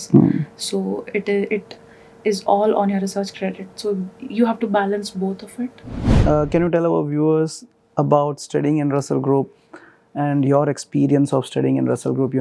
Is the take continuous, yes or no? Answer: no